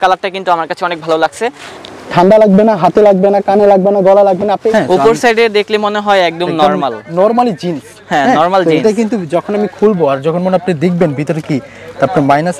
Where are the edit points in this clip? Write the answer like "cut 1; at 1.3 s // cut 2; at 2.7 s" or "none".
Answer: cut 1; at 1.7 s // cut 2; at 4.7 s